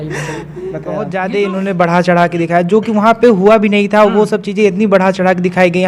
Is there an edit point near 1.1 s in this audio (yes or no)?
yes